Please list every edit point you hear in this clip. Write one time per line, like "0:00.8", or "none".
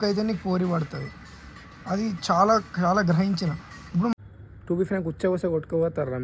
0:04.1